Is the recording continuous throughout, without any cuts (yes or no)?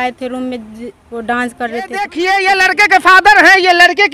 no